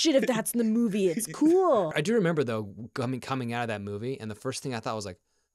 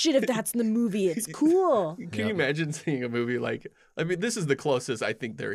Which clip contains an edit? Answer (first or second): first